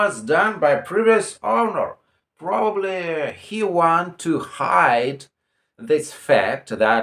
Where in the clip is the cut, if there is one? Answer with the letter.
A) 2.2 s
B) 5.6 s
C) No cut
C